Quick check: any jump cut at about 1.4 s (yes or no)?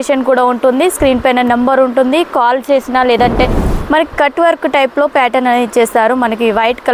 no